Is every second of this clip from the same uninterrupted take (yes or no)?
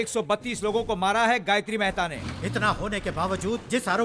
no